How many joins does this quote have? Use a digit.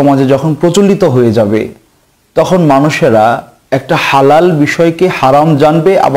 1